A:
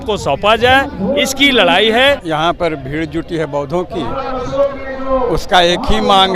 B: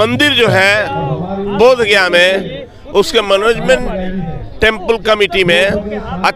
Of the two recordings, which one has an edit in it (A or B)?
A